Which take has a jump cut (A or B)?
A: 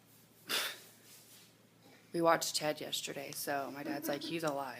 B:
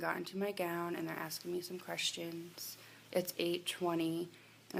A